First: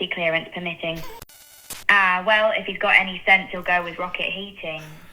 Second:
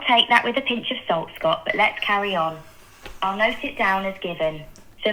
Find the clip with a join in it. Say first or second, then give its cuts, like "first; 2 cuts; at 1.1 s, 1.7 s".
first; 1 cut; at 1.2 s